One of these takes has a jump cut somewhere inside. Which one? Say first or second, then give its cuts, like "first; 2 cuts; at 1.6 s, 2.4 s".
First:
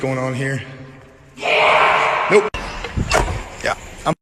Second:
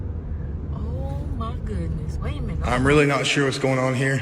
second; 1 cut; at 2.6 s